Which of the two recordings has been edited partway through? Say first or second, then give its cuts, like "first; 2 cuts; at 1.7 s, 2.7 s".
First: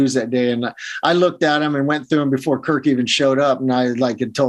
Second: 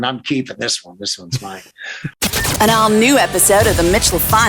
second; 1 cut; at 2.1 s